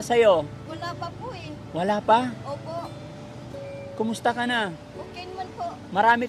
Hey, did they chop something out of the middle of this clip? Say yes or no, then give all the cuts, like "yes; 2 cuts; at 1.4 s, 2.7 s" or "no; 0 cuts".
no; 0 cuts